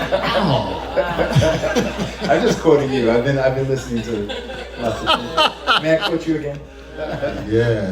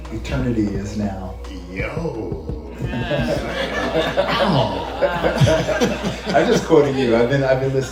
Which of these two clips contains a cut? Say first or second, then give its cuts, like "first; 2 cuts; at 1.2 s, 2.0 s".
first; 1 cut; at 7.0 s